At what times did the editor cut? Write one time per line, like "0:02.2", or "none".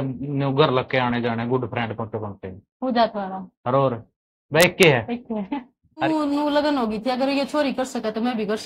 0:06.0